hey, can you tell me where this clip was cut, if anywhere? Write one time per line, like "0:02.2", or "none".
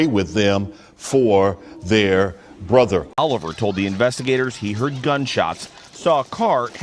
0:03.2